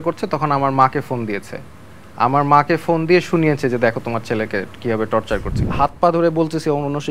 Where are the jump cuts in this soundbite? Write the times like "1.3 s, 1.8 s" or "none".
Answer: 5.6 s